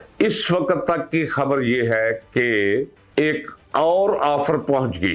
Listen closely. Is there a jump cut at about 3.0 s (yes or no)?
yes